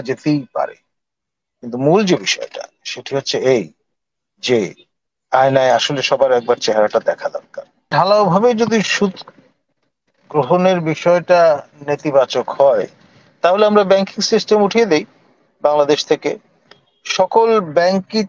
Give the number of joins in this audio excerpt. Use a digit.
1